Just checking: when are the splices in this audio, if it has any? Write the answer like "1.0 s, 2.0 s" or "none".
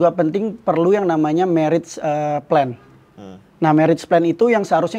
none